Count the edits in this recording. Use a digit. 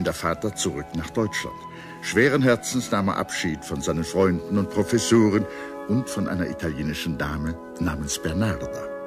1